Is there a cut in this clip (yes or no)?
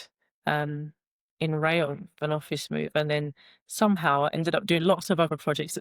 no